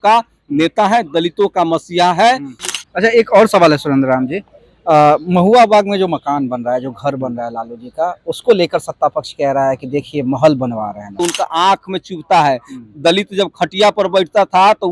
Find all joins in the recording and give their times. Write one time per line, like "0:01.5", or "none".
0:02.6
0:11.1